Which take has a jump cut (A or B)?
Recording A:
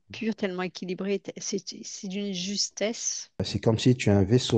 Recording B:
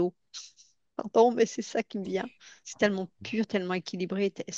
A